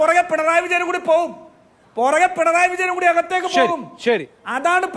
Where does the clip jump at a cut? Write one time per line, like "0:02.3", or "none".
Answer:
none